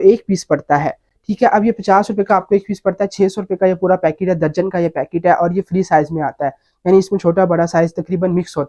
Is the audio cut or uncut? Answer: uncut